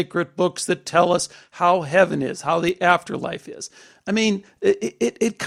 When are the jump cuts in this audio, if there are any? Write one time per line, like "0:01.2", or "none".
none